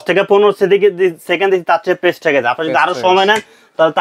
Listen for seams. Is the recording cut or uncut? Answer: uncut